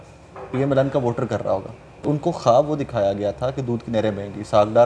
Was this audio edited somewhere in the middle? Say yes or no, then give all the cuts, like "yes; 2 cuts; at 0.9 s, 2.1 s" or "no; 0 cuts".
yes; 1 cut; at 2.0 s